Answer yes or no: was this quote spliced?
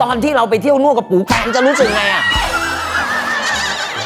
no